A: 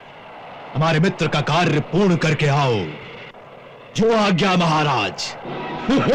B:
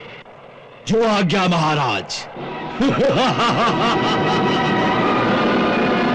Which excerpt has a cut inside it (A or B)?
B